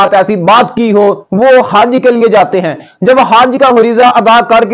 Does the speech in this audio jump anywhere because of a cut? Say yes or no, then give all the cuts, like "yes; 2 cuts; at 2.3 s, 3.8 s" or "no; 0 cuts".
yes; 1 cut; at 1.2 s